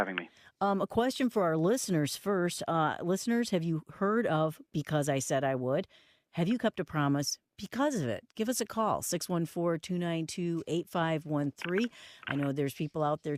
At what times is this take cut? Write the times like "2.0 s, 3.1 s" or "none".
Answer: 3.2 s